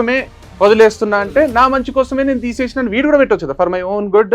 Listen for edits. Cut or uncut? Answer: uncut